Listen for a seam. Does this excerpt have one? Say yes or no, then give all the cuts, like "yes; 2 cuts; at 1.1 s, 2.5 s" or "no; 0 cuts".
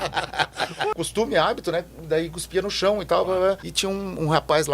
yes; 2 cuts; at 0.9 s, 3.7 s